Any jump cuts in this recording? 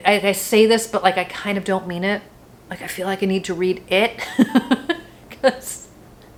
no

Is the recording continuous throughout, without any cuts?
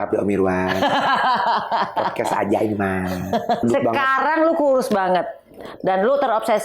no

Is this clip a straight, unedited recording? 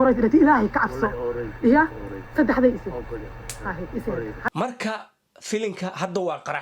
no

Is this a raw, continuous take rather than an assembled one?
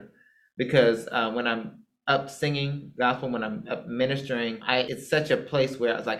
yes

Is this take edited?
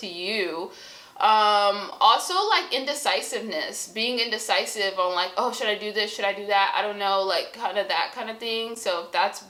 no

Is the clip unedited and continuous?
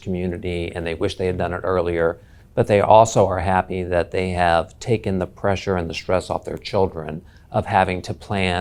yes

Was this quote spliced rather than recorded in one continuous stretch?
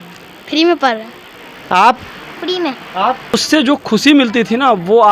yes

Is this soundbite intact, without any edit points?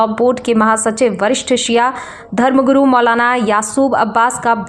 yes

